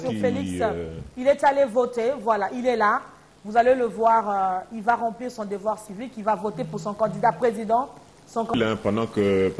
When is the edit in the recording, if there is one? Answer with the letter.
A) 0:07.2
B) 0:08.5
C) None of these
B